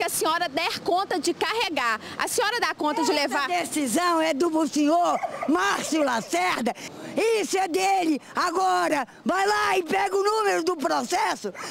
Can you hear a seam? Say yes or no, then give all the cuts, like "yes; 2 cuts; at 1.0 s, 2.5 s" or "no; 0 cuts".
no; 0 cuts